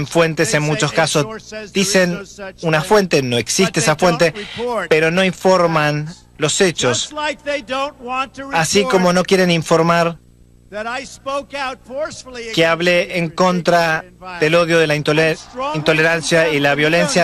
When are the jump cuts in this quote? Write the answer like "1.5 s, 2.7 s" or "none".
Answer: none